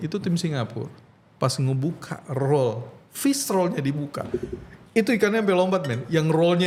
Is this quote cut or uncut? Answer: uncut